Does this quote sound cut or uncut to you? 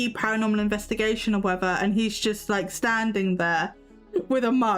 uncut